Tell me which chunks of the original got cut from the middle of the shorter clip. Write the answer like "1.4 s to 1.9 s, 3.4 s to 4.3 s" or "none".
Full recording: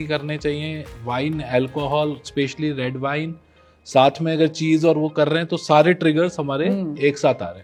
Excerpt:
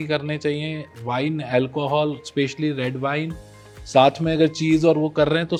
none